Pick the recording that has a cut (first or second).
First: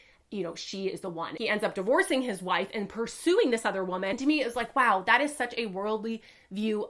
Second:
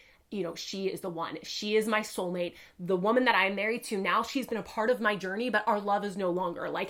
first